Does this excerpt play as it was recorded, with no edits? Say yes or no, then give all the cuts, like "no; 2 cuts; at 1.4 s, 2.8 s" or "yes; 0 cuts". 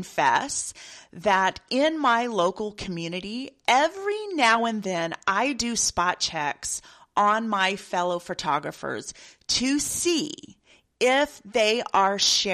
yes; 0 cuts